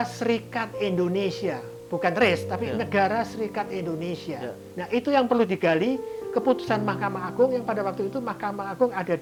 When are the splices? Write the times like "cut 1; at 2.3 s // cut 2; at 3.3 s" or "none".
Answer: none